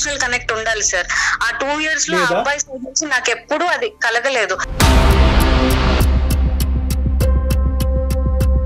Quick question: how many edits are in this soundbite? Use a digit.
1